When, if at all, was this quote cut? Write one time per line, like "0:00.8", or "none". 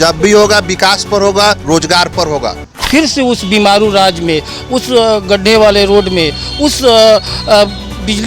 0:02.7